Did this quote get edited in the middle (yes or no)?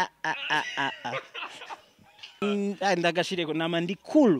yes